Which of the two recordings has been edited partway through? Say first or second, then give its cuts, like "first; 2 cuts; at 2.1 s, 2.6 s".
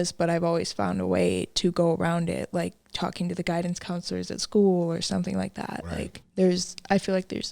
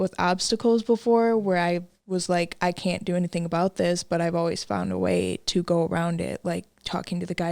first; 1 cut; at 6.2 s